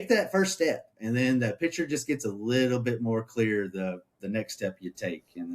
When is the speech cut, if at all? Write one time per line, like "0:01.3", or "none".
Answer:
0:00.9